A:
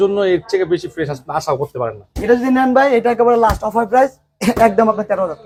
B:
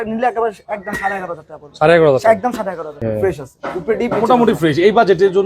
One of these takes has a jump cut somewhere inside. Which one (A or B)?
B